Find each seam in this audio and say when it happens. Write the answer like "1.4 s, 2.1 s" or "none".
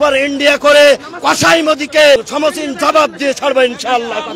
2.3 s